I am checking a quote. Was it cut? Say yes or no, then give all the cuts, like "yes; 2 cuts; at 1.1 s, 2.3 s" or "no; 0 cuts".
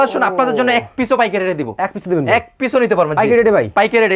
no; 0 cuts